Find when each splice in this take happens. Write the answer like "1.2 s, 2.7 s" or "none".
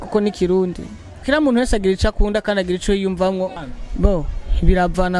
1.2 s, 3.6 s